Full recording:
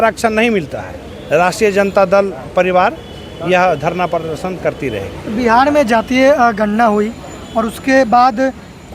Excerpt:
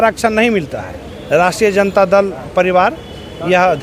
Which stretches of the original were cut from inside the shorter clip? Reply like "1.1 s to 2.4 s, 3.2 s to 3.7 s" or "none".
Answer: none